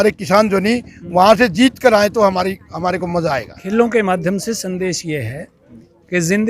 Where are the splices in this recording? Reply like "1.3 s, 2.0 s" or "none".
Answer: 3.6 s